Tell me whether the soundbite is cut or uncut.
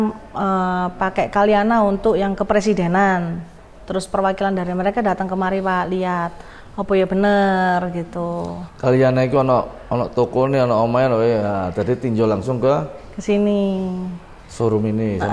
uncut